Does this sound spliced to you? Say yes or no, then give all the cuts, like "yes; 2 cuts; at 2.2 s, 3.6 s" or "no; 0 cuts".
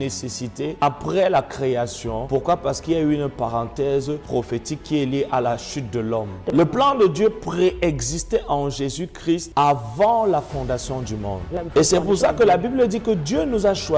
yes; 6 cuts; at 0.8 s, 2.2 s, 4.2 s, 6.5 s, 9.5 s, 11.5 s